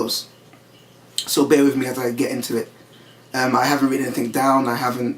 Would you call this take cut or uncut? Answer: cut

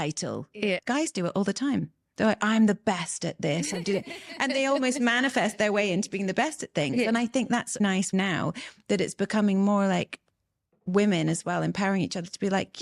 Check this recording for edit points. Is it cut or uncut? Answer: uncut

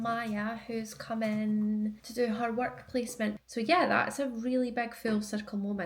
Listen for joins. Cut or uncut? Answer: cut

